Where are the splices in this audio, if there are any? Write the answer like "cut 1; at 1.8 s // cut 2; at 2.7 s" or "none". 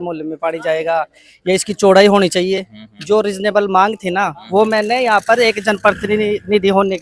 none